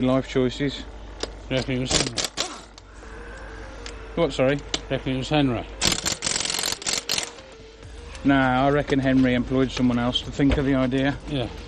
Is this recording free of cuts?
yes; 0 cuts

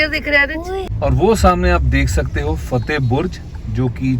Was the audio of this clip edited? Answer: yes; 1 cut; at 0.9 s

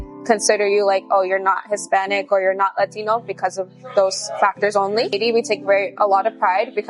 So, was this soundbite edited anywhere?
no; 0 cuts

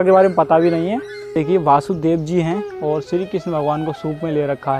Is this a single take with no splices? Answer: no; 1 cut; at 1.3 s

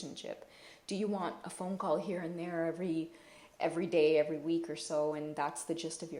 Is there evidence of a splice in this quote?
no; 0 cuts

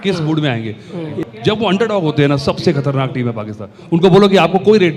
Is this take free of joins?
no; 1 cut; at 1.1 s

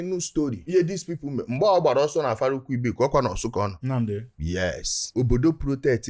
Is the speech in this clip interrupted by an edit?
no; 0 cuts

